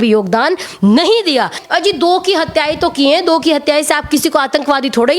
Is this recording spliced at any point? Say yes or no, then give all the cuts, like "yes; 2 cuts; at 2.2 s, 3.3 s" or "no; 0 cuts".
yes; 1 cut; at 1.6 s